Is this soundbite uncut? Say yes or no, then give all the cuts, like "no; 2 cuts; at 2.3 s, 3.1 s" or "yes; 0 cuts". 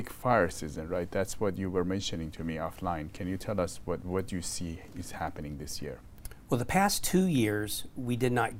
yes; 0 cuts